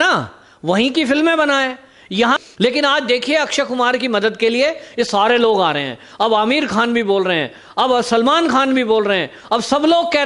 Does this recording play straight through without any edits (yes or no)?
no